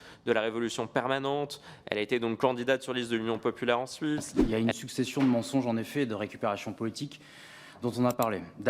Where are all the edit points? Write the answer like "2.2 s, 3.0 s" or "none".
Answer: 4.3 s